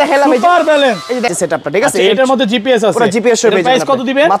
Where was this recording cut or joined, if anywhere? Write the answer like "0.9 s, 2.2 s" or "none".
1.3 s